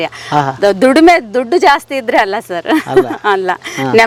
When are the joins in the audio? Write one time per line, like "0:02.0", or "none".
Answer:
none